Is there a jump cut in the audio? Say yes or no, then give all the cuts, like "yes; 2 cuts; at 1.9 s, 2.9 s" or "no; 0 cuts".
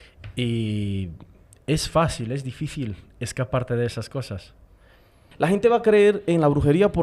yes; 1 cut; at 5.2 s